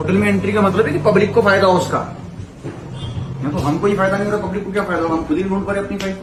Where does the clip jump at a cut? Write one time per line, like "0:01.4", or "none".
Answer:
none